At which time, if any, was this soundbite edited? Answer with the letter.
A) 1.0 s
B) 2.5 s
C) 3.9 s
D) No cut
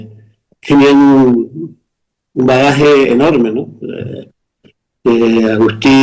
D